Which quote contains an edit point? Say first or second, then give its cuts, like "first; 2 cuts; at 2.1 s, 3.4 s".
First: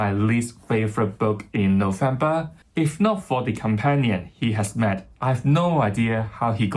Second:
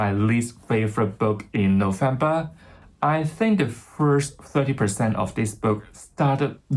first; 1 cut; at 2.6 s